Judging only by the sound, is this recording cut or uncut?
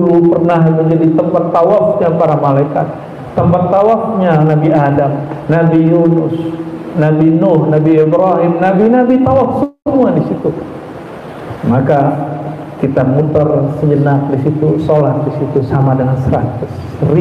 uncut